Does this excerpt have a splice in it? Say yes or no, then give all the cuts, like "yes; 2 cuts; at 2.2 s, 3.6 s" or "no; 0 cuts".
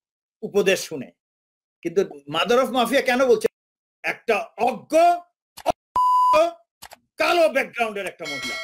no; 0 cuts